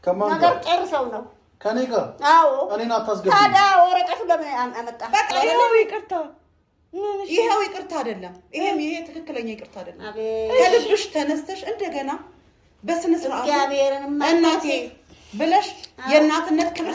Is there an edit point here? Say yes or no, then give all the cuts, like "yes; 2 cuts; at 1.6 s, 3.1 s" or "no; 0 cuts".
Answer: yes; 1 cut; at 5.3 s